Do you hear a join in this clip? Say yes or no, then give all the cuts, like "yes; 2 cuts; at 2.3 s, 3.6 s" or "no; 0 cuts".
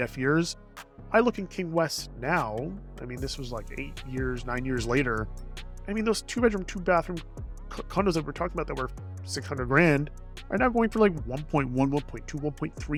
no; 0 cuts